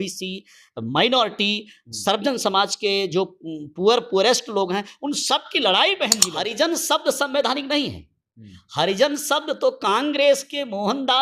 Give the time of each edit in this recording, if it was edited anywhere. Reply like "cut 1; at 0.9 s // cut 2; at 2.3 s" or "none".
cut 1; at 6.2 s

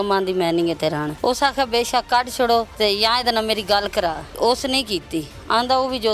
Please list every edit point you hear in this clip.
cut 1; at 1.1 s // cut 2; at 2.7 s // cut 3; at 4.3 s

